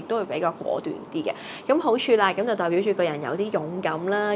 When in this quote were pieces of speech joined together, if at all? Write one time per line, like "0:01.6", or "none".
none